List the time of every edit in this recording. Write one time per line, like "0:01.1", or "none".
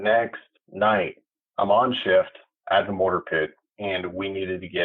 0:01.3